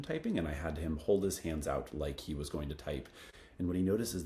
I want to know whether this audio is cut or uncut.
cut